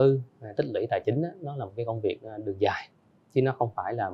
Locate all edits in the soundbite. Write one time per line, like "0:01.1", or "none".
none